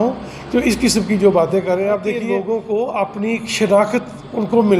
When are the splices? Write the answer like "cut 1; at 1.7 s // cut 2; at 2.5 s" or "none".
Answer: cut 1; at 2.3 s